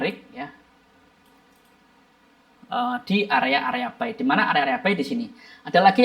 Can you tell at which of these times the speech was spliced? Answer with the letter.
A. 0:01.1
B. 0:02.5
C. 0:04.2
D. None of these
B